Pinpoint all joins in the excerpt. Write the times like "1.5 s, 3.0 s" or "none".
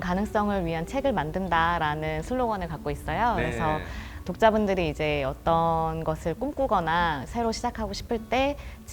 none